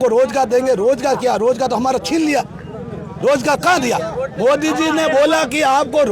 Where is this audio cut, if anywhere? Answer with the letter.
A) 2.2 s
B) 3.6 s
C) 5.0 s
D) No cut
D